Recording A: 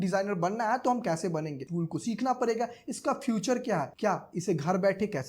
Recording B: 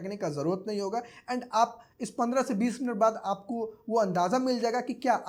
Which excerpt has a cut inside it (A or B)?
A